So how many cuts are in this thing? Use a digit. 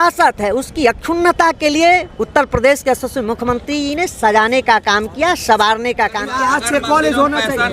1